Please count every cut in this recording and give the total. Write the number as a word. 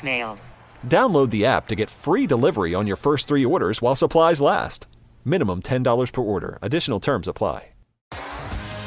one